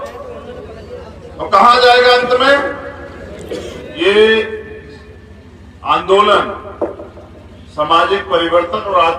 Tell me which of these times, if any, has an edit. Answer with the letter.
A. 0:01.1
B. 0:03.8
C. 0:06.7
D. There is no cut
B